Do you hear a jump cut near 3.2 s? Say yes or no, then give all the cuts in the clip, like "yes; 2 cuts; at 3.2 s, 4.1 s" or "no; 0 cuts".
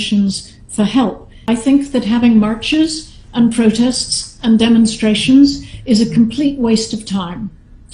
no; 1 cut; at 1.3 s